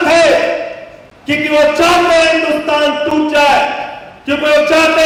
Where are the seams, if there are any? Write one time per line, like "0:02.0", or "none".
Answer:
none